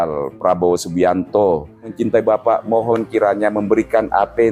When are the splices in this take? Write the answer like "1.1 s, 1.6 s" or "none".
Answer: 1.9 s